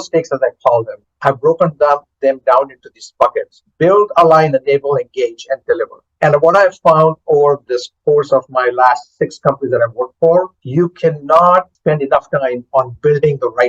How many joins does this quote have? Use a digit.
4